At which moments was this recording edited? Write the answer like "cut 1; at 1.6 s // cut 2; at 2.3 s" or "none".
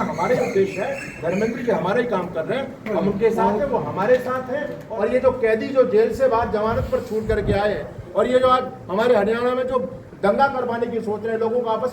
cut 1; at 4.8 s